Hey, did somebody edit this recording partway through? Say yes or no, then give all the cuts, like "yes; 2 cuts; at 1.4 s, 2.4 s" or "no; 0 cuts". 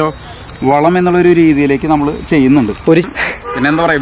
yes; 1 cut; at 3.0 s